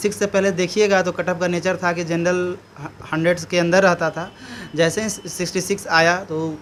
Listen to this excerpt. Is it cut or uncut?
uncut